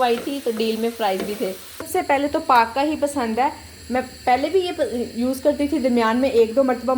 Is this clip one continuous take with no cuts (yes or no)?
no